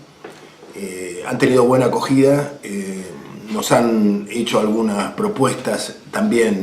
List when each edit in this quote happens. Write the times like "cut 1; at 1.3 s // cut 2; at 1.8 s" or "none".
cut 1; at 5.3 s